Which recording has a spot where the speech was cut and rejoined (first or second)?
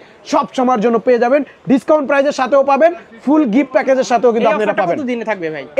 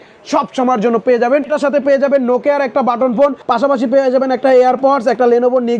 second